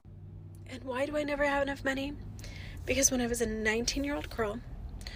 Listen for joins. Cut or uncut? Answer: uncut